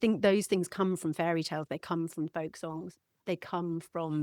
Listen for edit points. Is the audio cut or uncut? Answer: cut